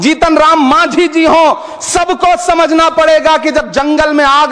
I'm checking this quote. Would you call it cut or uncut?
uncut